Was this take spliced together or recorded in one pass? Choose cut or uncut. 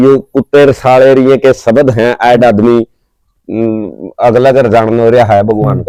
uncut